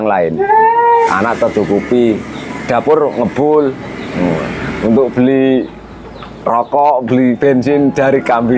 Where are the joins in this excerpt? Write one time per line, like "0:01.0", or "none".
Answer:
0:01.1